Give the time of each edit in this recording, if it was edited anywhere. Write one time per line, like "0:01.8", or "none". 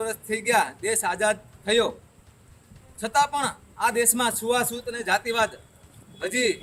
none